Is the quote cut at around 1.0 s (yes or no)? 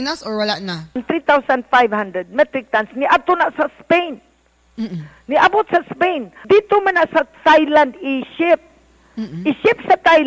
yes